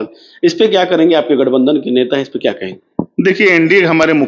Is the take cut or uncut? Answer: uncut